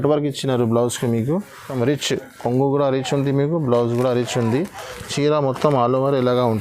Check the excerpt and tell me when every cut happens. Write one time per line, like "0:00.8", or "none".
0:01.7